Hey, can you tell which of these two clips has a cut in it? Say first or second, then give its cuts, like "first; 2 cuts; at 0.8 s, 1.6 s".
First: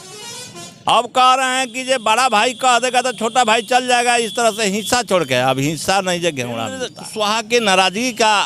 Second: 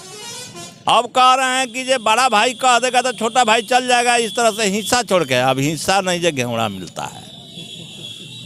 first; 1 cut; at 7.0 s